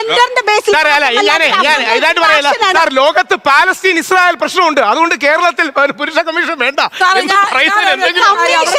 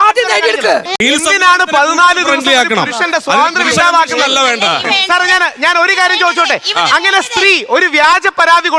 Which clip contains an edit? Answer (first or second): second